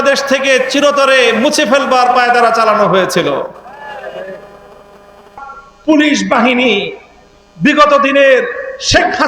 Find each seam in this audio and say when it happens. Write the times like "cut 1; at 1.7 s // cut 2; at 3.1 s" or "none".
cut 1; at 5.4 s